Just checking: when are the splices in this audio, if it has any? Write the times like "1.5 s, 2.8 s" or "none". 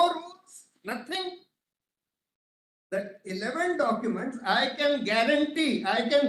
none